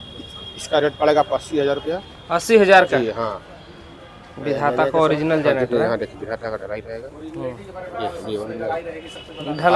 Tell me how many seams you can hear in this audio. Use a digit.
0